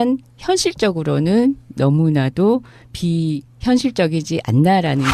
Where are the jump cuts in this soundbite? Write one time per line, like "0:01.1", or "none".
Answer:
0:01.9